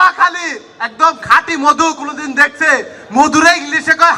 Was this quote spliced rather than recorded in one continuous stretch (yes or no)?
no